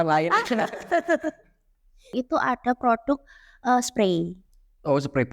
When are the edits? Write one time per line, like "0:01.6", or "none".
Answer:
0:02.1